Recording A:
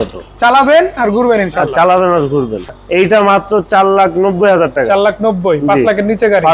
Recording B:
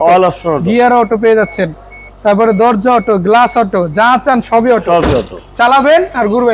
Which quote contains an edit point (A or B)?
A